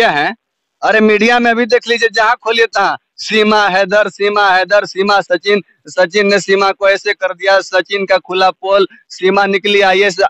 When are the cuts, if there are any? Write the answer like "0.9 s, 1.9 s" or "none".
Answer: none